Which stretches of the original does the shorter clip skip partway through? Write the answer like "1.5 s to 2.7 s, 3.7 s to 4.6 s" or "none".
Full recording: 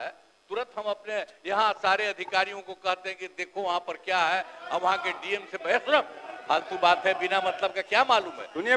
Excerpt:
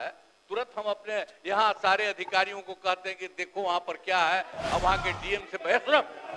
none